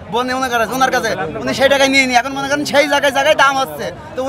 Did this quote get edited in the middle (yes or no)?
no